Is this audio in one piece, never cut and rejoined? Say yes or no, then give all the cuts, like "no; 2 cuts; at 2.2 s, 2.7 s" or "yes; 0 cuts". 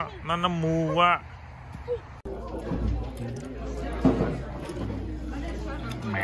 no; 1 cut; at 2.2 s